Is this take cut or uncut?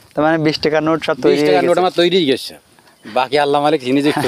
uncut